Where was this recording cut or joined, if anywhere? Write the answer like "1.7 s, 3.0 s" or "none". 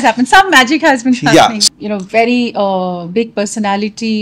1.6 s